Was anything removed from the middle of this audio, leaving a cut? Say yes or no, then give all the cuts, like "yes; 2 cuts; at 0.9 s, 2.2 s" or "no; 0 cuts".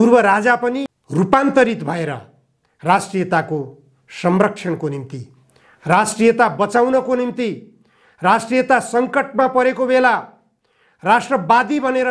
yes; 1 cut; at 1.0 s